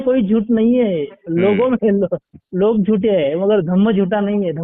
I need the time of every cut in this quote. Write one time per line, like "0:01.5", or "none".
none